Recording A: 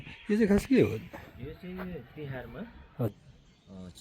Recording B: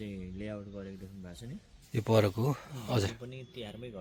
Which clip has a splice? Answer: A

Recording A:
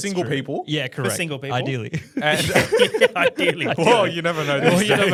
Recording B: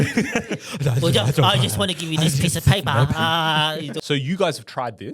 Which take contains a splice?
B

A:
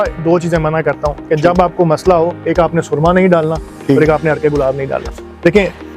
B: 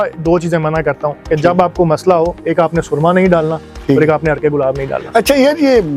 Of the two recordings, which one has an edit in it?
A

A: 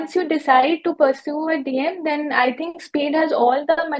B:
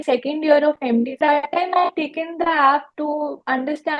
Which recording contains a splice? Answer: B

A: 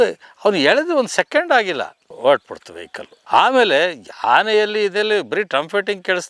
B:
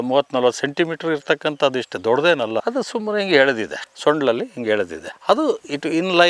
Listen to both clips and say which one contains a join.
B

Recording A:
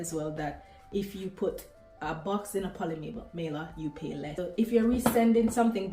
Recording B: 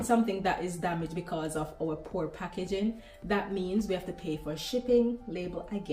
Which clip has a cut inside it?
A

